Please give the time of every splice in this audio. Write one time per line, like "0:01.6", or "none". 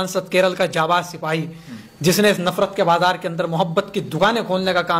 none